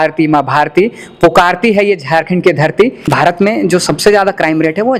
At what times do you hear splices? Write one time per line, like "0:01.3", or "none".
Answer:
0:03.0